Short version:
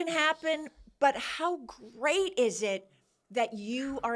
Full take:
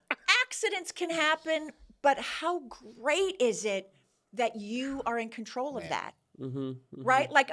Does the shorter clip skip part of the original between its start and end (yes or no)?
no